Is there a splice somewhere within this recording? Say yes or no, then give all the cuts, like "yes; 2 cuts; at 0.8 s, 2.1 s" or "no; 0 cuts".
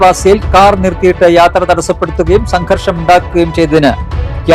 no; 0 cuts